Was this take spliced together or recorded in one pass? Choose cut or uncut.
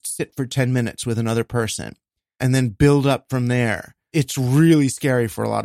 cut